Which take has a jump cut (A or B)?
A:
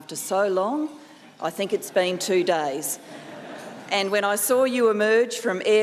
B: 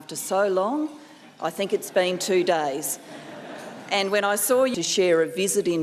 A